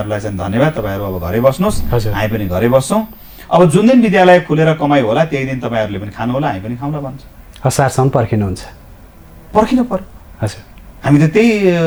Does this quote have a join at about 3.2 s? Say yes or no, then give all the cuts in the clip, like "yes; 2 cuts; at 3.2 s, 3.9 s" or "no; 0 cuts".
no; 0 cuts